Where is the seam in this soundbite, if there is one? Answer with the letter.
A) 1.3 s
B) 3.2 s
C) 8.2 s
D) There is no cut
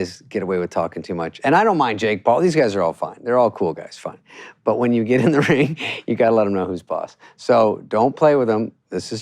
A